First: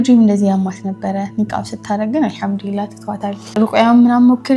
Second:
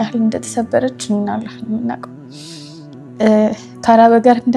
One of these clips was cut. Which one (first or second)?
first